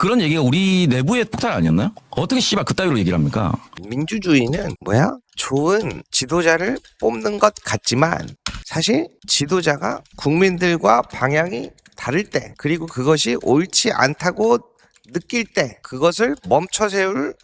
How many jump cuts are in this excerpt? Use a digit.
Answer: 2